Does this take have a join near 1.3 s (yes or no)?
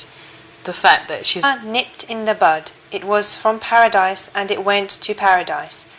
no